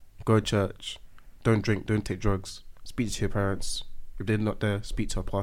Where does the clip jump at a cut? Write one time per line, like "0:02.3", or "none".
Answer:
none